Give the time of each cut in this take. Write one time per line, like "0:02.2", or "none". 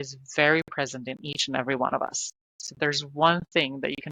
none